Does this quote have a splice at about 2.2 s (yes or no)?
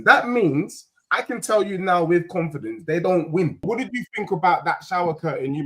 no